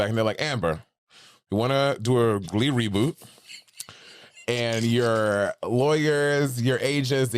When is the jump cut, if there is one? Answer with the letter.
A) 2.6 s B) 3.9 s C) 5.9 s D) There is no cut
D